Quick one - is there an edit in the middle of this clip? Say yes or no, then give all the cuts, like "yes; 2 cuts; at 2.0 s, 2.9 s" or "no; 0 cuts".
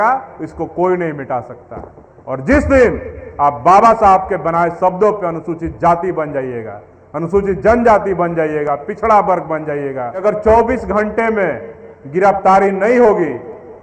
yes; 1 cut; at 10.2 s